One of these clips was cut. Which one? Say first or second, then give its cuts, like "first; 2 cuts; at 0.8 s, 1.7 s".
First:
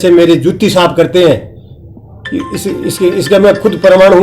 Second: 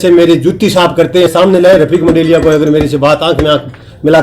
second; 1 cut; at 1.3 s